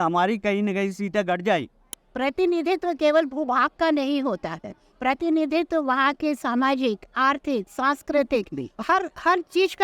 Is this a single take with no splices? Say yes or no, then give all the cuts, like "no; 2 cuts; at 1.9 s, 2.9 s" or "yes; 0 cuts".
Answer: no; 1 cut; at 2.0 s